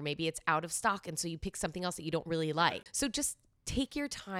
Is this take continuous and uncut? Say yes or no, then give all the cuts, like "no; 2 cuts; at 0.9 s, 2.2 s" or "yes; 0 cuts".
no; 1 cut; at 2.6 s